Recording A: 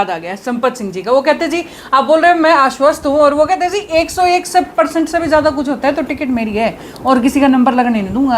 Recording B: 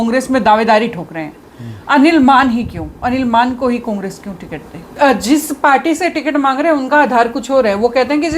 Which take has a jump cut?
B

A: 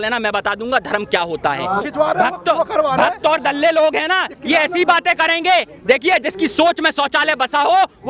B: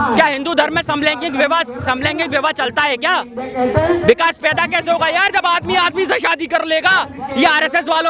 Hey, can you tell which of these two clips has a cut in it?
A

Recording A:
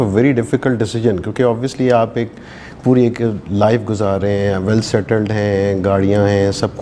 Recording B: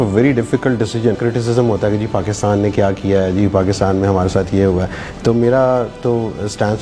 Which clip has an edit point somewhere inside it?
B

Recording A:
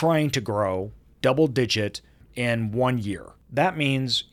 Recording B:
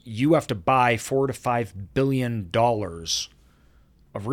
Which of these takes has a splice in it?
A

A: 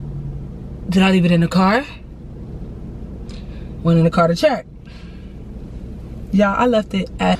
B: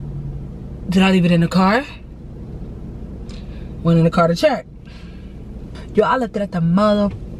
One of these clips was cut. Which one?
B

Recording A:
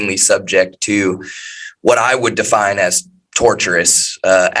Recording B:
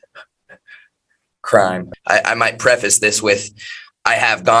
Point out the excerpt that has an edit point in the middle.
B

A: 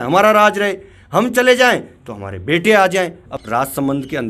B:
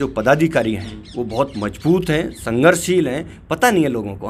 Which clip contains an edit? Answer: A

